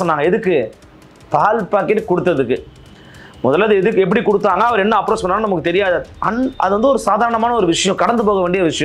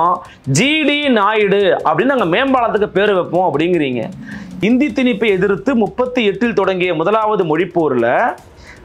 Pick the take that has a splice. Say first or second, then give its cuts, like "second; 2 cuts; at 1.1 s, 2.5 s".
second; 1 cut; at 4.5 s